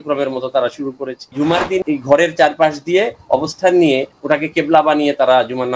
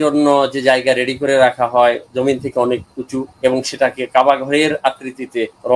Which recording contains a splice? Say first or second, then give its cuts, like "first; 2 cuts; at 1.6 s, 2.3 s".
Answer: first; 1 cut; at 1.4 s